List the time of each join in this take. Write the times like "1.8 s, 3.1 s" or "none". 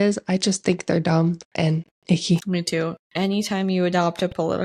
3.0 s